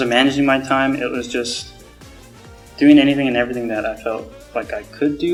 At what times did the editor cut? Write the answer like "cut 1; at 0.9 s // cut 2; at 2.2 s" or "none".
none

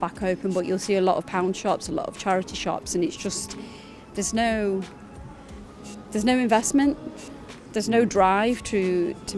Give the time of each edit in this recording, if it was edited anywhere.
none

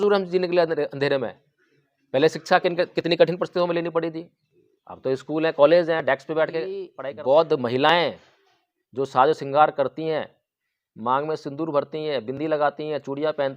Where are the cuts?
cut 1; at 6.9 s

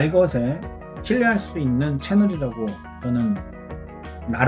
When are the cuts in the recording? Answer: none

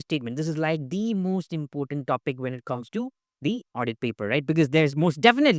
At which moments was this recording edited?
none

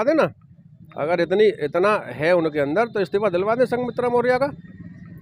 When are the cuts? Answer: none

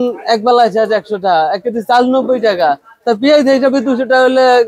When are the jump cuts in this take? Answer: none

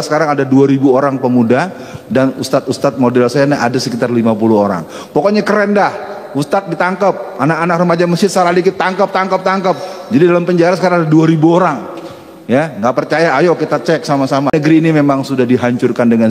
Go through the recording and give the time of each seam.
cut 1; at 14.5 s

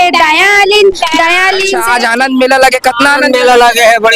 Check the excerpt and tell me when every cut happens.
cut 1; at 1.8 s

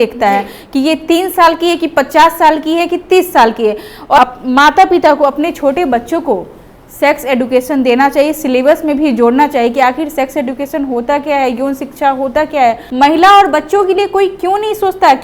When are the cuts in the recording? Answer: cut 1; at 4.2 s // cut 2; at 12.8 s

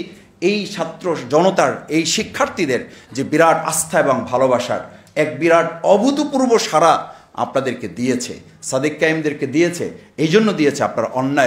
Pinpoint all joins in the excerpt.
none

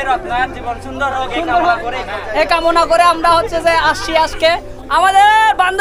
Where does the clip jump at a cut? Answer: cut 1; at 4.7 s

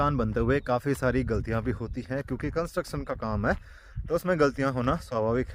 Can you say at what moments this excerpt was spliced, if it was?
none

